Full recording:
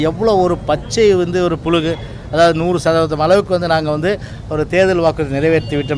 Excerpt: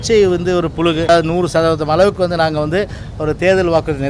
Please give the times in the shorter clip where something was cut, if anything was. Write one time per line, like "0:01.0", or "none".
0:01.1